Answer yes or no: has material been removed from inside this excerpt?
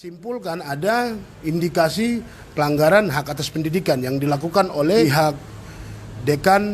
yes